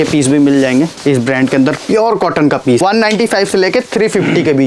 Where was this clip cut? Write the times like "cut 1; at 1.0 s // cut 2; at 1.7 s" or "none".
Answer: cut 1; at 2.8 s